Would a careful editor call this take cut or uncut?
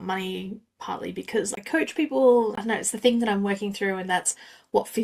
cut